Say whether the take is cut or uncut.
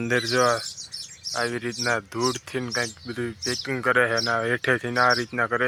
uncut